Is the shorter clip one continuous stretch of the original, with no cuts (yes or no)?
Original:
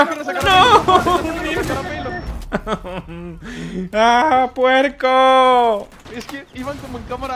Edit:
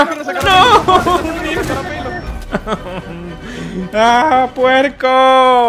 yes